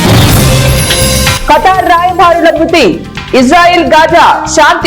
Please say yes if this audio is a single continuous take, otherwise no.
no